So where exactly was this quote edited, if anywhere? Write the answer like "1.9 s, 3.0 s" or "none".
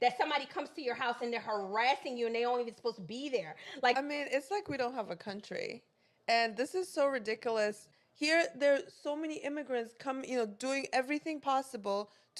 4.0 s, 7.9 s